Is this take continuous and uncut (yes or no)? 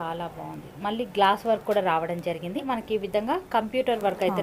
no